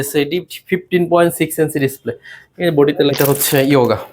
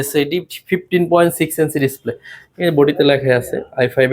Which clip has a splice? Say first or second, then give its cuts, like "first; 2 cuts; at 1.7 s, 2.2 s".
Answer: first; 1 cut; at 3.1 s